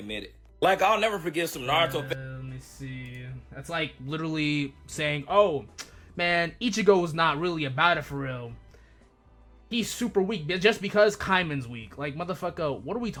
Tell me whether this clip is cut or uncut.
uncut